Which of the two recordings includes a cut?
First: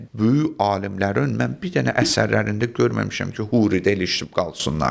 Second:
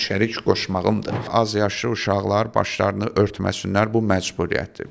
second; 1 cut; at 1.3 s

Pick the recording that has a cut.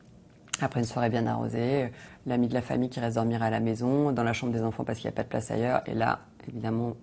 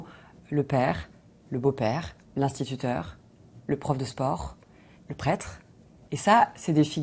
second; 1 cut; at 2.2 s

